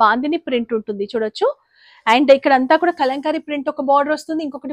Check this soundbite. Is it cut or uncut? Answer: uncut